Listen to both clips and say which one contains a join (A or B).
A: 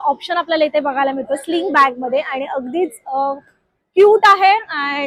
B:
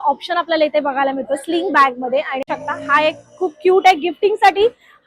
B